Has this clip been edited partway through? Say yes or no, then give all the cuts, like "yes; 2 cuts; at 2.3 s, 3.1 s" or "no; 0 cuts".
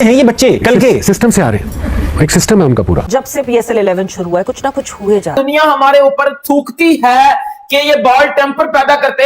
yes; 2 cuts; at 3.0 s, 5.3 s